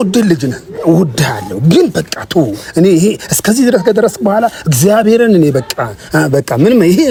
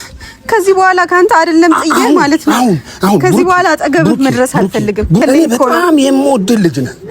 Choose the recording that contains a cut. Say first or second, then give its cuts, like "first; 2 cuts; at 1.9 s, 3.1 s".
second; 1 cut; at 5.2 s